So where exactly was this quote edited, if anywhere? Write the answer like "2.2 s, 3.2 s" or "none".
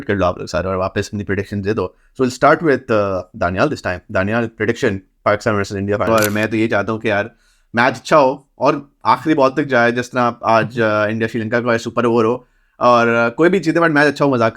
6.1 s